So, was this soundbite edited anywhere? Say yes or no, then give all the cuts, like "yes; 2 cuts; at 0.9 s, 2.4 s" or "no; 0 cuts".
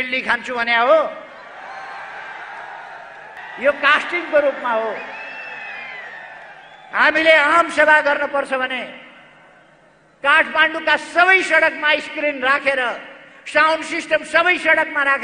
yes; 1 cut; at 3.4 s